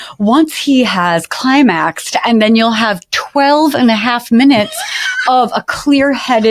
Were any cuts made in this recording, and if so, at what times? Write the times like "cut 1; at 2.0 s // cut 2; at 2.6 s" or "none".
none